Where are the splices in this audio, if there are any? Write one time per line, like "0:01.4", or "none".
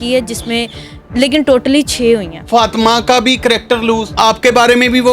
0:02.4
0:04.1